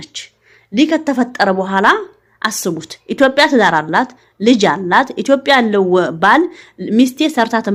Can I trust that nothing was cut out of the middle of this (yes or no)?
yes